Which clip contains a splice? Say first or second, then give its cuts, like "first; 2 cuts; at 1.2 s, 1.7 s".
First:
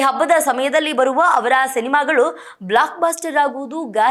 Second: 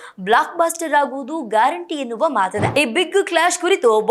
second; 1 cut; at 2.6 s